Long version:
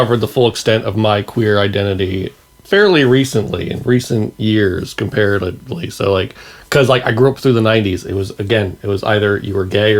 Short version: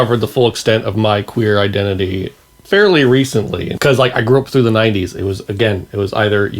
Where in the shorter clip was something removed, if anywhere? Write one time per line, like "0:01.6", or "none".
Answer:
0:03.6